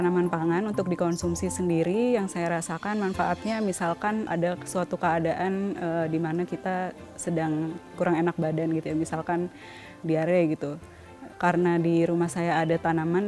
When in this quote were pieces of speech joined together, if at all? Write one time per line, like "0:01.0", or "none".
none